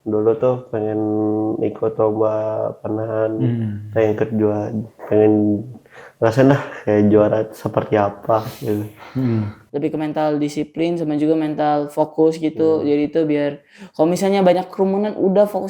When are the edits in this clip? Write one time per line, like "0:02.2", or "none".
0:09.6